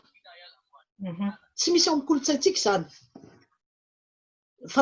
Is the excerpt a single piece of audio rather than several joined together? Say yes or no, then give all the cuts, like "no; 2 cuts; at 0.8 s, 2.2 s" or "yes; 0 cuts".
no; 1 cut; at 3.9 s